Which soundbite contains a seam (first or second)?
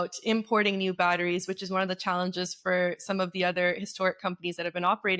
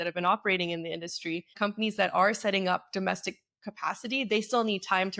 second